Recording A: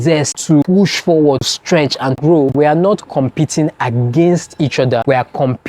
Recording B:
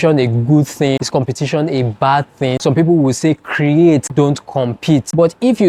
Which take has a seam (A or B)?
A